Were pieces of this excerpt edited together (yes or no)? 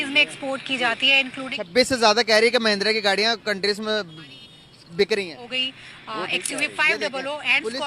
no